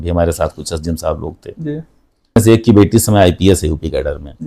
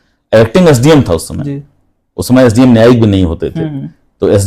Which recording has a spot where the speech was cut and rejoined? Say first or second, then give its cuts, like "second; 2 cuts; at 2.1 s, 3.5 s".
first; 1 cut; at 2.4 s